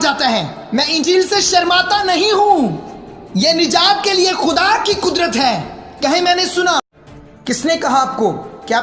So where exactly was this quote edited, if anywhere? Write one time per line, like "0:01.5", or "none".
0:06.9